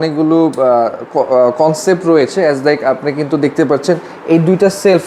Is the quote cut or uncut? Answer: uncut